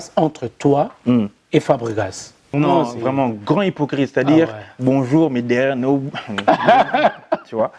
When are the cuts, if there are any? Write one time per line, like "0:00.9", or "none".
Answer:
0:02.5